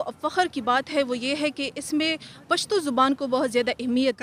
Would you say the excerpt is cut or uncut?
uncut